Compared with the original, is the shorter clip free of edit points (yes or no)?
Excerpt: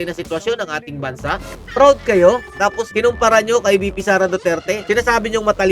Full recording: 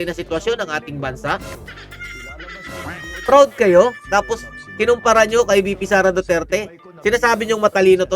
no